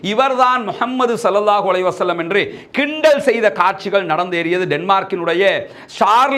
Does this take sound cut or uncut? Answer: uncut